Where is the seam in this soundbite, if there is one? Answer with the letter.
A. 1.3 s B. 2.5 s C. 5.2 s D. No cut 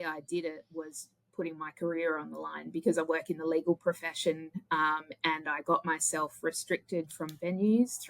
D